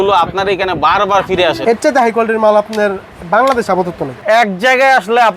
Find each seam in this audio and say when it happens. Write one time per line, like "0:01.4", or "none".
0:01.6
0:04.2